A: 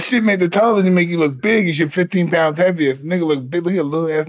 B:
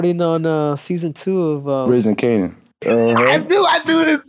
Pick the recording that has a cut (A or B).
B